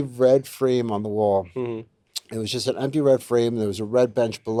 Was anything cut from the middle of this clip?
no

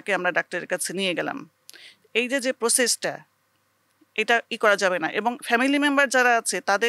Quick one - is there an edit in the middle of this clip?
no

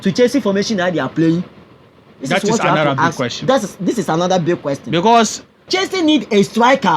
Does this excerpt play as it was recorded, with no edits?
no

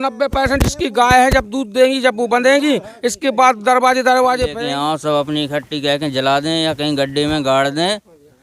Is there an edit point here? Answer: yes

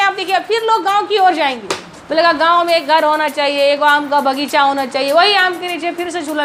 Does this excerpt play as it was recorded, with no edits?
yes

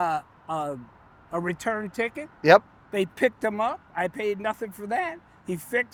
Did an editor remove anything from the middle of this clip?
no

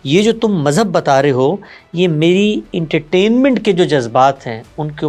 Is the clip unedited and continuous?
yes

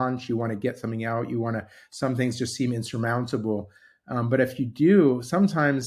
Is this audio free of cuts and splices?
yes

